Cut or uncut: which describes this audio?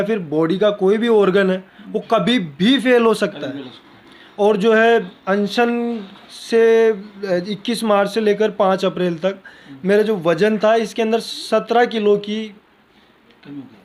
uncut